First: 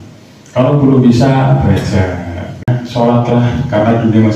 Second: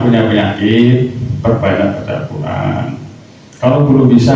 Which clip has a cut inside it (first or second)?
first